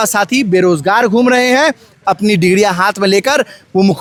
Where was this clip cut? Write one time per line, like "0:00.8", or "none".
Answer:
none